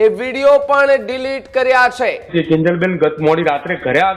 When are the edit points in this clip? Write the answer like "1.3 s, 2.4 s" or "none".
2.3 s